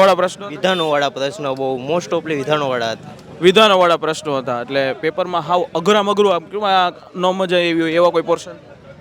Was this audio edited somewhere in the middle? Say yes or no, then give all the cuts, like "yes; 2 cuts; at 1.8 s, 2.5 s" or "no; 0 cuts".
no; 0 cuts